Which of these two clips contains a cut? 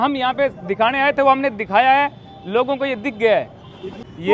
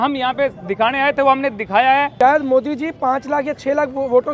second; 1 cut; at 2.1 s

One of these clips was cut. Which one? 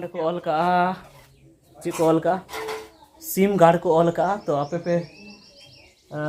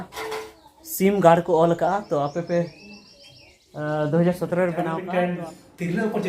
second; 1 cut; at 4.9 s

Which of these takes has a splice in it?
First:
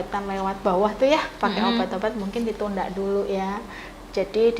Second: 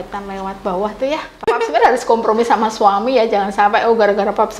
second; 1 cut; at 1.4 s

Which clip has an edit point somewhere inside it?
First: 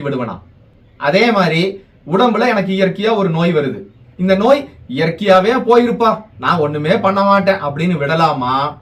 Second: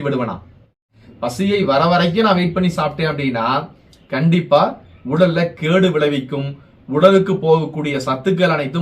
second; 1 cut; at 0.9 s

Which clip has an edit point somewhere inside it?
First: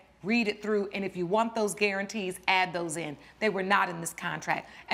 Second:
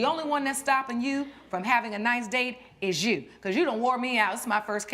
second; 1 cut; at 3.2 s

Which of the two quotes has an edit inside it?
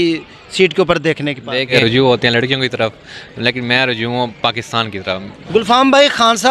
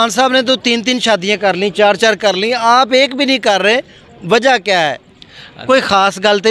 first; 2 cuts; at 1.7 s, 5.3 s

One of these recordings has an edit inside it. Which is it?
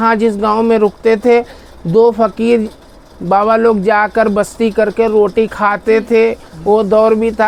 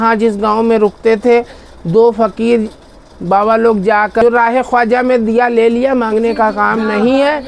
second; 1 cut; at 4.2 s

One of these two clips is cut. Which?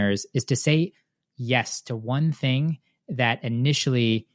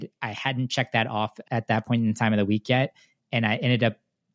second; 1 cut; at 1.4 s

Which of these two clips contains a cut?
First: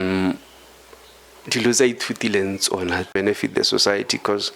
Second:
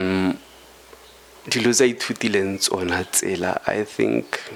first; 1 cut; at 3.1 s

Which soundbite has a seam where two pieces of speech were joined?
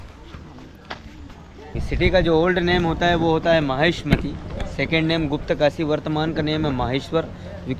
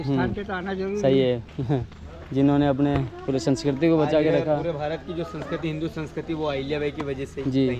first; 1 cut; at 1.8 s

